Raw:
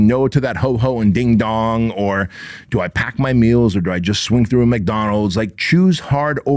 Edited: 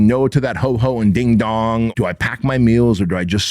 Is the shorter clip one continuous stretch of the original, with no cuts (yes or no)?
no